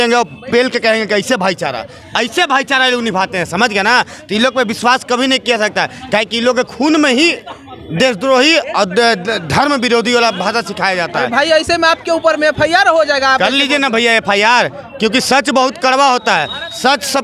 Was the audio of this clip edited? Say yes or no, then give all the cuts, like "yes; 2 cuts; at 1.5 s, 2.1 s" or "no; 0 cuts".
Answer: no; 0 cuts